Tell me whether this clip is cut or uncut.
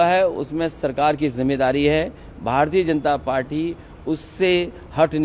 uncut